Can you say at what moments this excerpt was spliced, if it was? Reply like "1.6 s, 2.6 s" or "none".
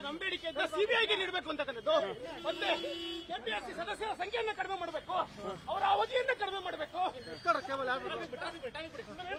none